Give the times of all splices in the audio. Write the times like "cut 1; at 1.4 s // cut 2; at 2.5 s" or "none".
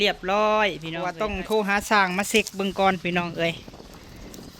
cut 1; at 1.2 s

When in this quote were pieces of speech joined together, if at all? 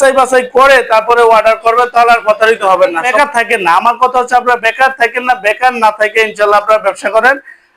cut 1; at 3.1 s

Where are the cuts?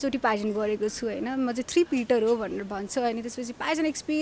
none

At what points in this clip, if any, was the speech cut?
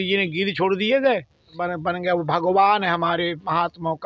cut 1; at 1.6 s

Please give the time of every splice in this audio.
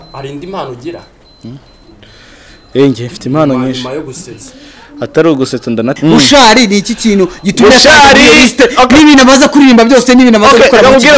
cut 1; at 5.9 s

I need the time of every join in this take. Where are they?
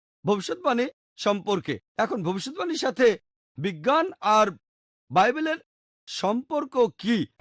none

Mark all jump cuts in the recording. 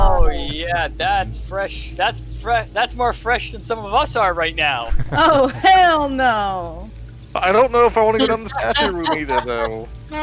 none

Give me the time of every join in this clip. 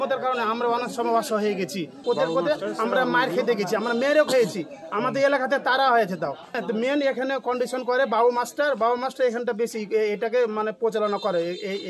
cut 1; at 2.0 s // cut 2; at 6.5 s

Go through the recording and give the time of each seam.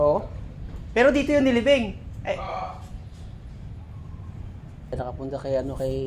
cut 1; at 4.9 s

